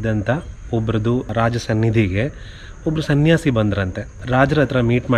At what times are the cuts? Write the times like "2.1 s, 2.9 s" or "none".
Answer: 1.3 s, 4.2 s